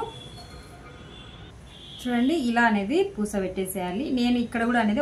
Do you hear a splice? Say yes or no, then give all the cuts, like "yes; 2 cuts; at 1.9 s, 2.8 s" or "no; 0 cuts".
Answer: no; 0 cuts